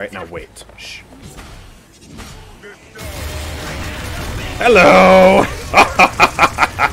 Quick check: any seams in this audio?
yes; 1 cut; at 1.1 s

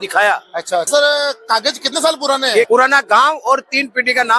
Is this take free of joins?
no; 2 cuts; at 0.9 s, 2.7 s

